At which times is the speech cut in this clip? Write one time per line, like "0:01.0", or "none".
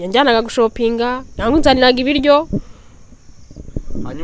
none